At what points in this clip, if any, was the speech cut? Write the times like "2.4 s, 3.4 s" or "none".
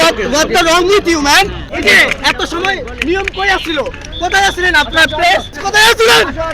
1.6 s, 5.6 s